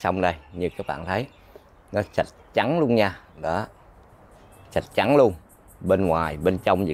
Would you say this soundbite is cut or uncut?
uncut